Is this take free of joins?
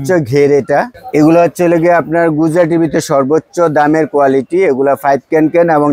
no; 1 cut; at 1.0 s

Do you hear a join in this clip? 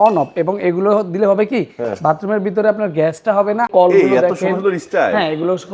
yes; 1 cut; at 3.7 s

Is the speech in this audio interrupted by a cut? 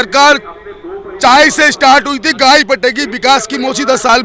no; 0 cuts

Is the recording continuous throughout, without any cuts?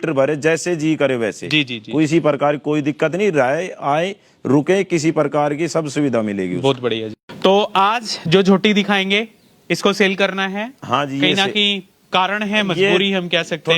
no; 1 cut; at 7.2 s

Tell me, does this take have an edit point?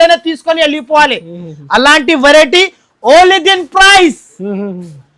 no; 0 cuts

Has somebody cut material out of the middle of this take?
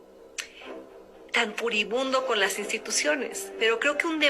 yes; 1 cut; at 3.4 s

